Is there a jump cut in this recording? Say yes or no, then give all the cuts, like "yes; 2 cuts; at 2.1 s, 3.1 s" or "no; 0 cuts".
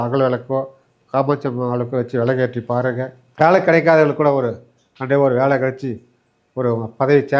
yes; 1 cut; at 3.2 s